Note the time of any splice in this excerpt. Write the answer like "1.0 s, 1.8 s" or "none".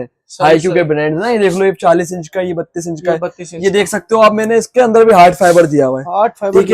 none